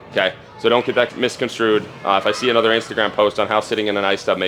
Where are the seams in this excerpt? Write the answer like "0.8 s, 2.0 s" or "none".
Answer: 1.1 s

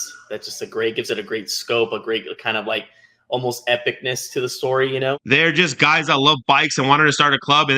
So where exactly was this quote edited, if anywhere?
5.2 s

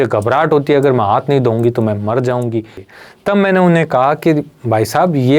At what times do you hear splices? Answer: 2.8 s

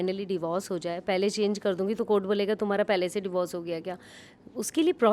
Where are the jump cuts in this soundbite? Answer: none

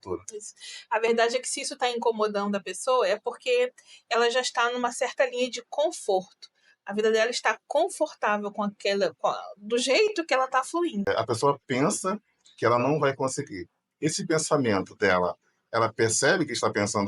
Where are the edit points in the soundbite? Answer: 11.1 s

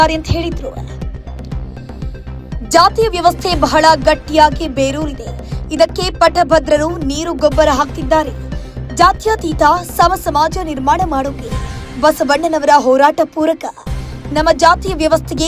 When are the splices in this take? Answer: 0.8 s, 2.6 s

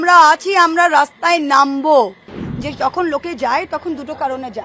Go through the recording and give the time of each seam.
2.4 s

